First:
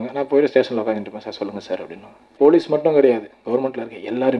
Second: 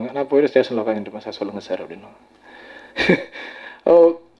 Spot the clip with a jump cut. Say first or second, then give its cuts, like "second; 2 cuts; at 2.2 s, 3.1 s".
first; 1 cut; at 2.3 s